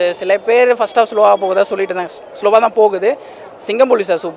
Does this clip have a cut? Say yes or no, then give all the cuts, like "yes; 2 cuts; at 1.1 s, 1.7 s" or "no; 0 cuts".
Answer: yes; 1 cut; at 3.3 s